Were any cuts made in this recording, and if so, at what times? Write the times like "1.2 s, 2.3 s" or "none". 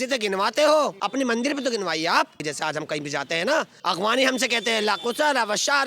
1.0 s, 2.5 s, 3.7 s